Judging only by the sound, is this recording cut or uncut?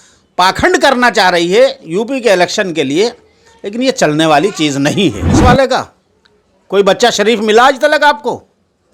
cut